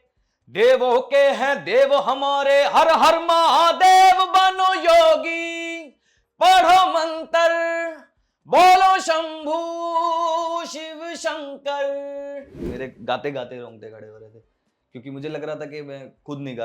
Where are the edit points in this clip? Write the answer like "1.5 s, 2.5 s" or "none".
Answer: 12.6 s